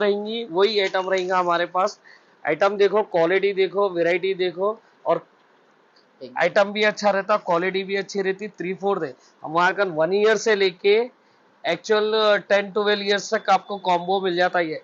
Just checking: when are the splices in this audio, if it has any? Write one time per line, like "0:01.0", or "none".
none